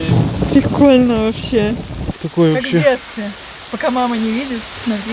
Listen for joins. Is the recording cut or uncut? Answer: cut